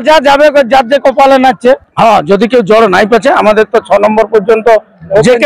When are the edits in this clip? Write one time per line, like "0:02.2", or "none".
0:01.9